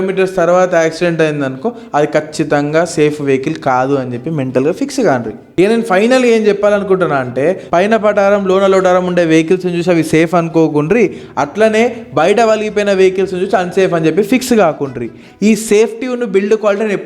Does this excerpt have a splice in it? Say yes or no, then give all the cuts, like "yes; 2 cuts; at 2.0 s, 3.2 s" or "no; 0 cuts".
no; 0 cuts